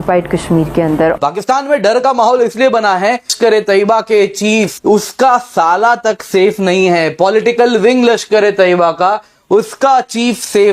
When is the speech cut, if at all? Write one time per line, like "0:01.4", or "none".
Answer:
0:01.2
0:03.3
0:04.8